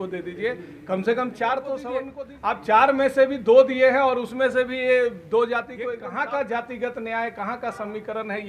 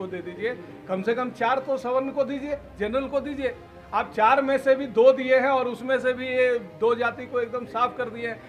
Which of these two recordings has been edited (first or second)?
first